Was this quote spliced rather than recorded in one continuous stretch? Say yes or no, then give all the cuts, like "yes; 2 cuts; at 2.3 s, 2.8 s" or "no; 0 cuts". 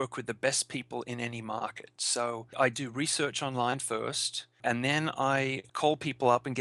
yes; 3 cuts; at 2.5 s, 4.6 s, 5.6 s